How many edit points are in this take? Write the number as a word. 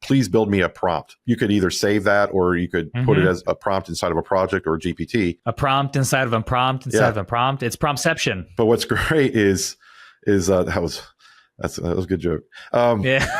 three